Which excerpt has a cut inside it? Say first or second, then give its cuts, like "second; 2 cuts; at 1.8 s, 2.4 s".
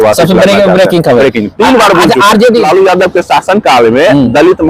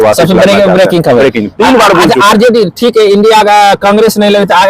first; 1 cut; at 2.6 s